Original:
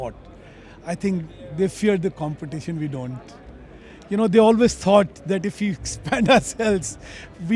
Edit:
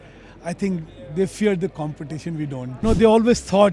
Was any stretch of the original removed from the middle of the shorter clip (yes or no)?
yes